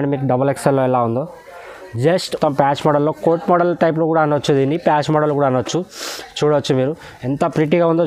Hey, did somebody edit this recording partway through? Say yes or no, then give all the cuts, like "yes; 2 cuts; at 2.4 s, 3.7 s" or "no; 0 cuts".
yes; 1 cut; at 2.4 s